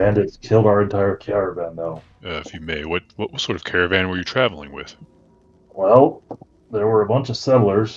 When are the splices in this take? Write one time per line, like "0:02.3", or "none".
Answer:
0:02.1

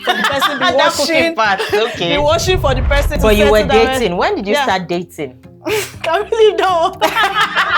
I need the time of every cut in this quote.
0:03.2

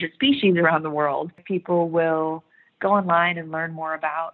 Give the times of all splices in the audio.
0:01.4

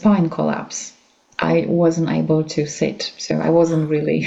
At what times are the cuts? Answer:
none

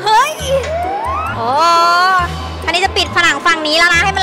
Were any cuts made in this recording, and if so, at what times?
0:01.2

